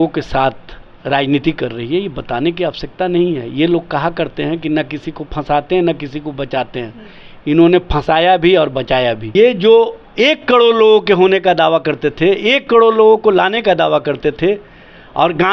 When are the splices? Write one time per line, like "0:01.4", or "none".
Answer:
0:09.2